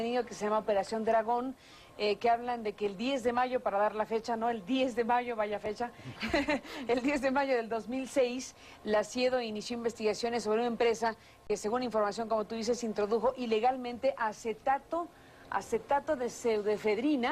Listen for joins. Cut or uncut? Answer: cut